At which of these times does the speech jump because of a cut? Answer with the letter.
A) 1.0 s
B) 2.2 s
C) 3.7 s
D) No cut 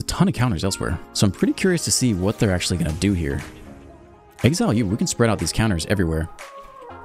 A